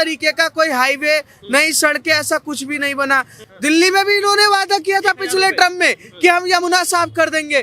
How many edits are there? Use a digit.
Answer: 1